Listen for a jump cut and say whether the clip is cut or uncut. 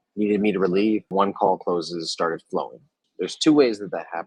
cut